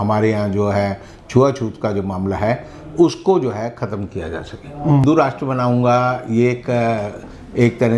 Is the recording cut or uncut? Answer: cut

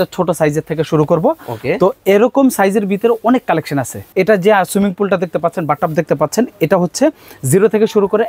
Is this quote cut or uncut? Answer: cut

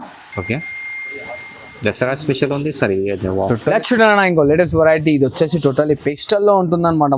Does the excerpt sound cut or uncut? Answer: cut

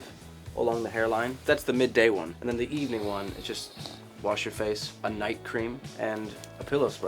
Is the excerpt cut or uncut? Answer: cut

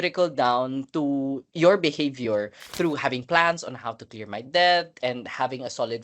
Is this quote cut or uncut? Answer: cut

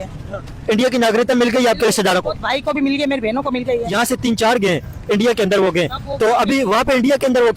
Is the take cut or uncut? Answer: cut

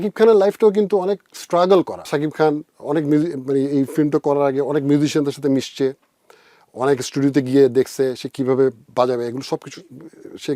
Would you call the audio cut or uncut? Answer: cut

